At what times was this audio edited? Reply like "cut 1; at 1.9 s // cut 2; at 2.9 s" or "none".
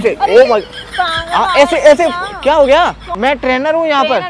cut 1; at 3.0 s